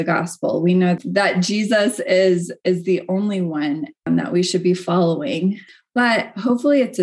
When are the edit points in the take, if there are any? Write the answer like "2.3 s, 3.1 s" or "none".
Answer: 1.0 s, 4.0 s